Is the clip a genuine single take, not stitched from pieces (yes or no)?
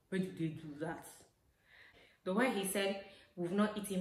no